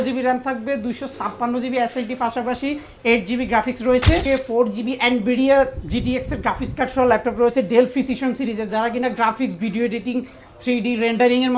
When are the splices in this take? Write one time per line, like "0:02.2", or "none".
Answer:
0:04.2